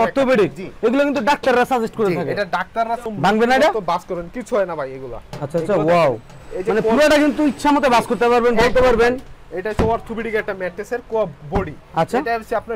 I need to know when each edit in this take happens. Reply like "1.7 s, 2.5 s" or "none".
none